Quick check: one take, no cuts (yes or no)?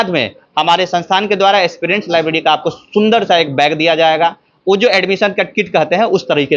yes